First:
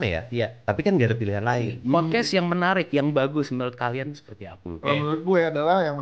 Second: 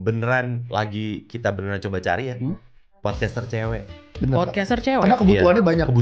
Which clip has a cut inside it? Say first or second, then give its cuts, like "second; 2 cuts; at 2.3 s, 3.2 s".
first; 2 cuts; at 1.9 s, 4.8 s